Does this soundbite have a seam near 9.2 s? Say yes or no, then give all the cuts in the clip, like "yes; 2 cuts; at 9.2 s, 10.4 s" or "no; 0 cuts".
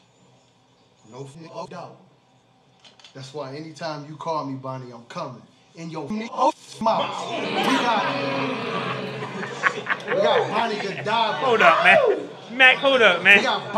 no; 0 cuts